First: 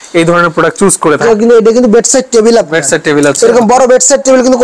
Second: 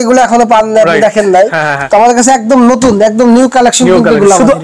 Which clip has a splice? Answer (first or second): first